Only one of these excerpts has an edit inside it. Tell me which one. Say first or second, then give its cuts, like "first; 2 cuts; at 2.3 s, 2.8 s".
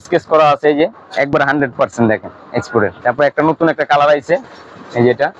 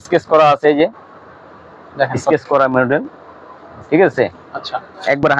first; 2 cuts; at 1.0 s, 3.0 s